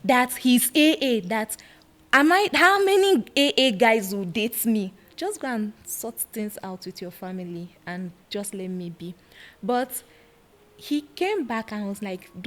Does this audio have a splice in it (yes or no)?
yes